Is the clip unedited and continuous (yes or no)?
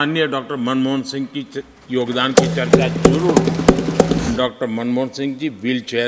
no